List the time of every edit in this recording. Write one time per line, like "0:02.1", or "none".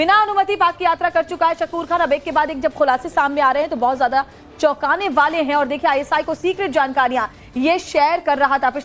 0:06.7

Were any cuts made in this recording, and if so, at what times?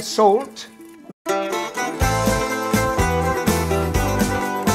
none

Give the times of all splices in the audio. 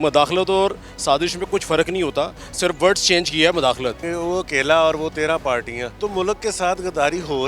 0:04.1
0:05.8

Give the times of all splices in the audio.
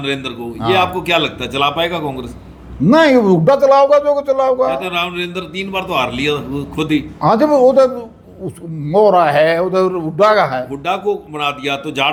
none

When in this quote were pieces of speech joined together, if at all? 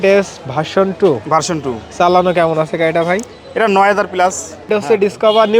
0:04.7

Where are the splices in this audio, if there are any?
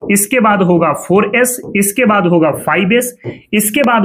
none

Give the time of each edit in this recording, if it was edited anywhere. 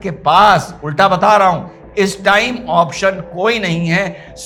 none

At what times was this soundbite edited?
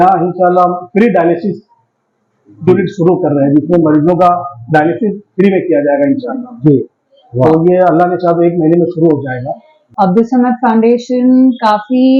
0:09.9

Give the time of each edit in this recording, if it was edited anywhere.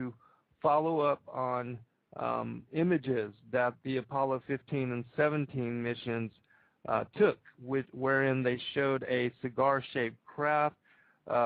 0:08.4

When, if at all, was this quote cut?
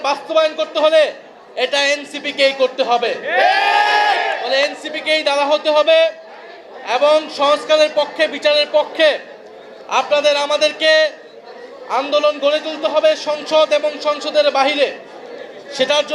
none

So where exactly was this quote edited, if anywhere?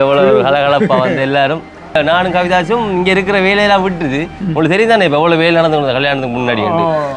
0:02.0

